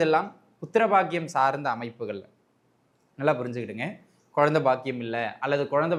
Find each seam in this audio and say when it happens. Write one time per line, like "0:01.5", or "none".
none

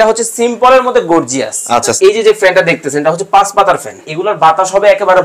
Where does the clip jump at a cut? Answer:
0:01.9
0:04.1

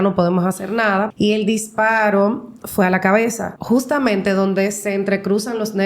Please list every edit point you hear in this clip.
0:01.1
0:03.5

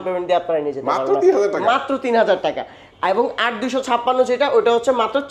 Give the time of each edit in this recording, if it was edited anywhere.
none

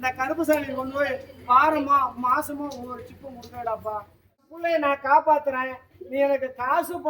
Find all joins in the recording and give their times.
0:04.5

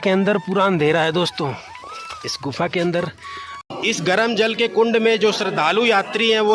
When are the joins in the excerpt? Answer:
0:03.6

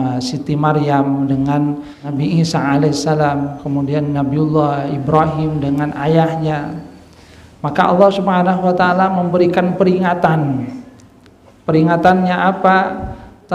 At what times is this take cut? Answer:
0:02.0

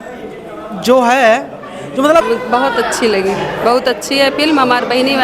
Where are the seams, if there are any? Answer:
0:02.2

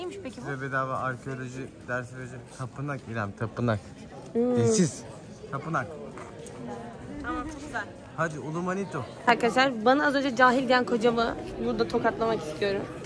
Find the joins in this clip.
none

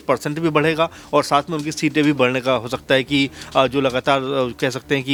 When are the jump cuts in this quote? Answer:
none

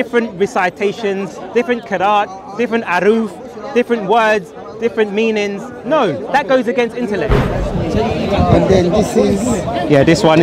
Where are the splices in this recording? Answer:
0:07.5

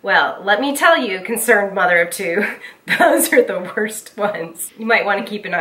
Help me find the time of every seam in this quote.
0:04.7

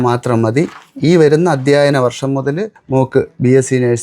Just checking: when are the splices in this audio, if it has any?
0:02.7

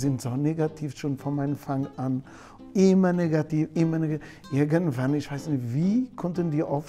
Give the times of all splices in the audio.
none

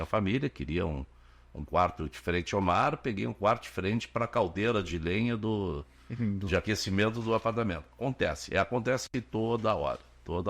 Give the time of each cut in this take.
none

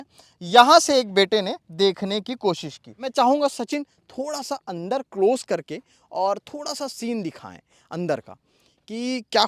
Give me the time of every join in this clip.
0:03.1

